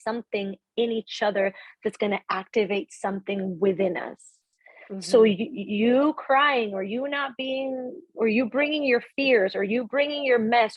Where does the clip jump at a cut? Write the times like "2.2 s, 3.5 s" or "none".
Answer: none

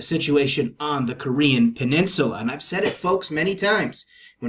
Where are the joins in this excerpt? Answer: 1.8 s

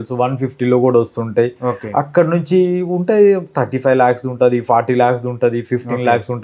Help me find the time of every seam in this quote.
none

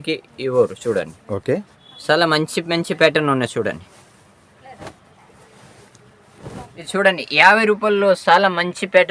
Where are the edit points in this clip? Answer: 7.0 s

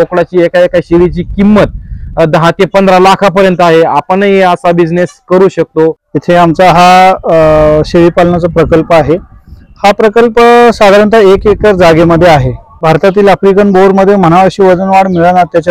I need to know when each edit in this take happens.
6.1 s, 12.8 s

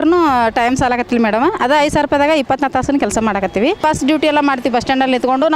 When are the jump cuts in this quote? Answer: 3.8 s

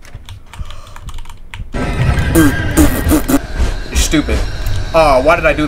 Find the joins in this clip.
3.4 s

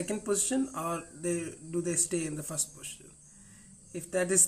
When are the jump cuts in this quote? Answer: none

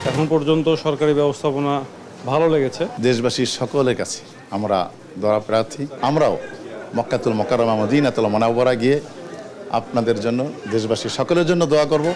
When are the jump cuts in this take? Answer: 2.9 s, 5.8 s

